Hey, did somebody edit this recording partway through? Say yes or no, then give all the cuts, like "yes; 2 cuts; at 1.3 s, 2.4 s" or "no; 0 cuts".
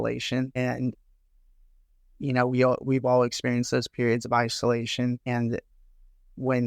no; 0 cuts